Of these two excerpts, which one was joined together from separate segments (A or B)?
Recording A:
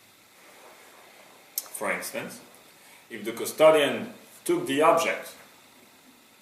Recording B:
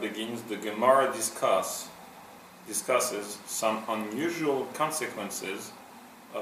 A